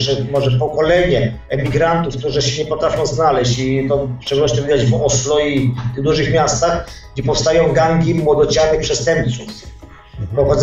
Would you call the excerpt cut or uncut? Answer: uncut